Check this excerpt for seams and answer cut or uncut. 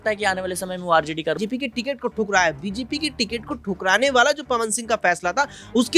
cut